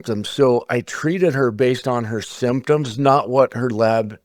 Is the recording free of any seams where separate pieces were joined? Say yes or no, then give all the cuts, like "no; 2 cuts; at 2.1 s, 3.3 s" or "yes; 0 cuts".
yes; 0 cuts